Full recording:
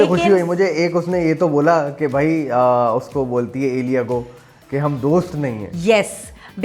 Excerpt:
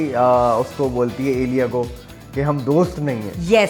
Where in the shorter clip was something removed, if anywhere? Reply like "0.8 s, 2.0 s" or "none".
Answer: none